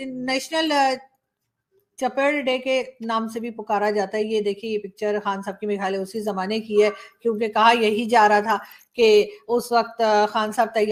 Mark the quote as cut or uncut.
uncut